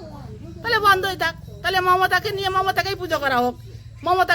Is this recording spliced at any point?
no; 0 cuts

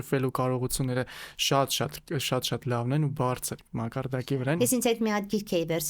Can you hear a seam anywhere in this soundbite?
yes; 1 cut; at 4.6 s

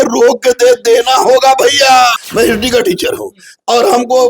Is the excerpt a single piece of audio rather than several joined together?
no; 1 cut; at 2.2 s

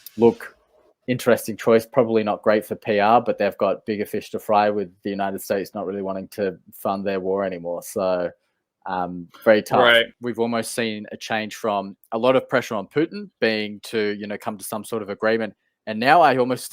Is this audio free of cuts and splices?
no; 1 cut; at 10.1 s

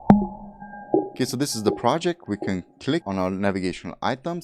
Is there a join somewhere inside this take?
yes; 2 cuts; at 1.1 s, 3.0 s

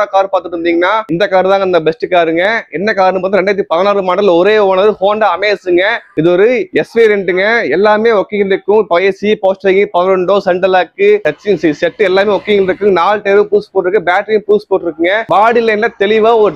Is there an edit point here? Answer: no; 0 cuts

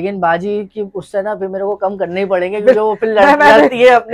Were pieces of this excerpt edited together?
no; 0 cuts

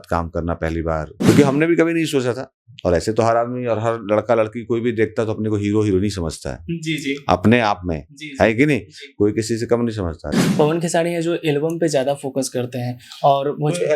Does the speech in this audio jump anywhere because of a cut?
yes; 2 cuts; at 1.1 s, 10.3 s

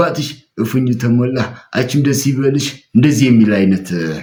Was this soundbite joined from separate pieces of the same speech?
no; 0 cuts

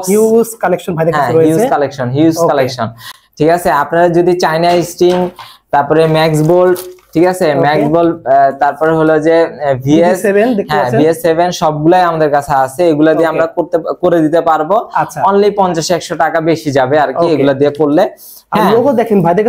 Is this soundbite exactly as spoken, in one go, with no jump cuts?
yes; 0 cuts

